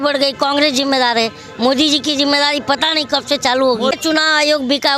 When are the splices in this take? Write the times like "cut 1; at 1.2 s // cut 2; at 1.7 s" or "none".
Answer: cut 1; at 4.0 s